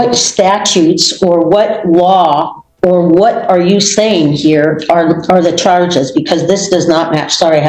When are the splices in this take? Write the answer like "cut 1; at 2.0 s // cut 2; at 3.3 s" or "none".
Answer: none